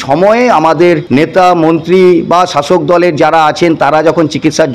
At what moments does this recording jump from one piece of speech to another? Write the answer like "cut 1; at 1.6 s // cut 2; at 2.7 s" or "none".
cut 1; at 1.0 s